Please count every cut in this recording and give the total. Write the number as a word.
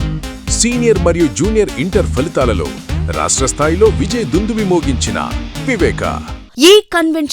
one